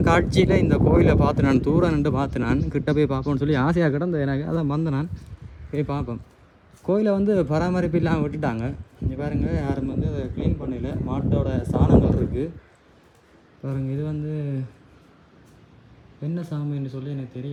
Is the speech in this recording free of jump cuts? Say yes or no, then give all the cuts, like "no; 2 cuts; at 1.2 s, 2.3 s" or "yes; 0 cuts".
yes; 0 cuts